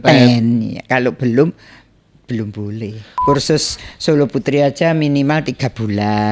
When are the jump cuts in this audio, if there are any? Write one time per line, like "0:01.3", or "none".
0:03.1